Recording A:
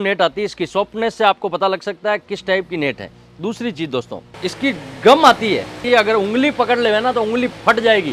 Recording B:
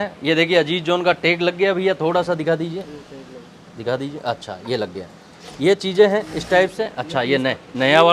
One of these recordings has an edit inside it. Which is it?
A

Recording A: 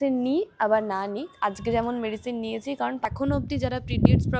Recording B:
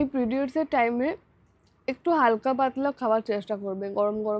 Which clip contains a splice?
A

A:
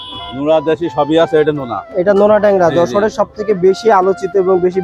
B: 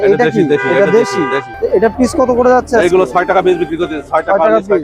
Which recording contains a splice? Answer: B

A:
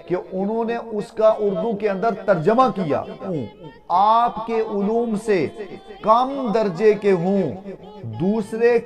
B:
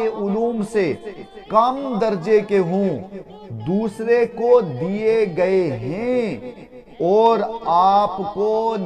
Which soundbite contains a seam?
A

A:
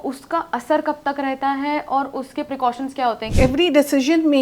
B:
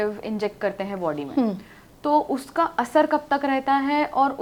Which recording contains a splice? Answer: A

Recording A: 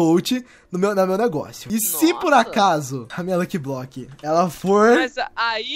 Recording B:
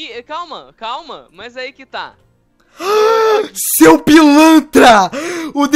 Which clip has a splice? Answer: A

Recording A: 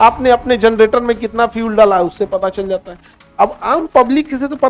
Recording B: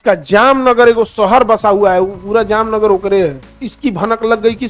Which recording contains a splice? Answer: B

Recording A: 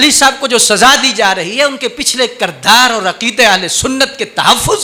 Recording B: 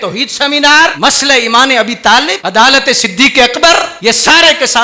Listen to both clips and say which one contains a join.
B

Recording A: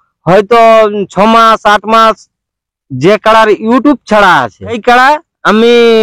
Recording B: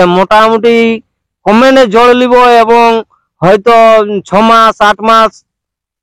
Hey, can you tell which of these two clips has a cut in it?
A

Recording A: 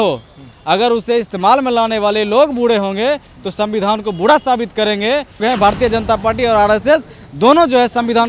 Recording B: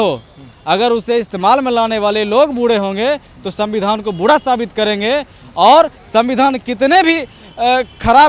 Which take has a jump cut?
A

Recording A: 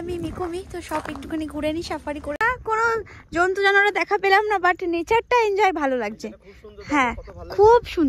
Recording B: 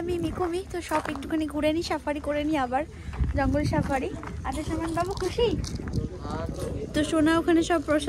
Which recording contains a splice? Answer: A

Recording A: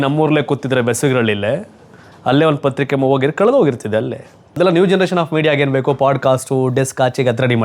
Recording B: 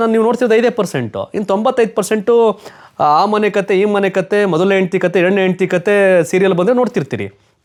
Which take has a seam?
A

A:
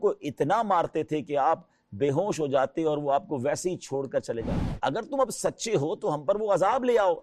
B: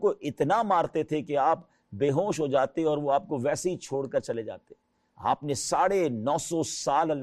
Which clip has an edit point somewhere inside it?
A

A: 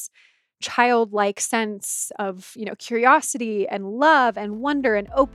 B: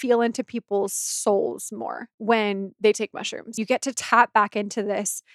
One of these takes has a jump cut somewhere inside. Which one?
B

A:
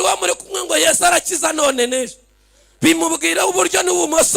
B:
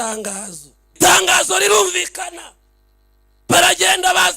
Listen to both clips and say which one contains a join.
B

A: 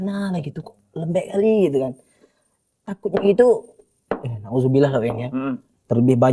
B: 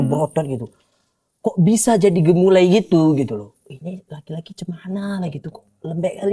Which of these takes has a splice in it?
B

